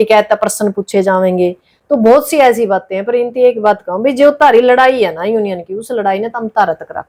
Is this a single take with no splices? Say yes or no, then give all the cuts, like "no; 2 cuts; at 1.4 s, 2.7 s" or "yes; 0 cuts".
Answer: yes; 0 cuts